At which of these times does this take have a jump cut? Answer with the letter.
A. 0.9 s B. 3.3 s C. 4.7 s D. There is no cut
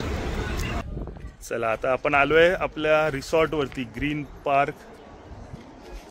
A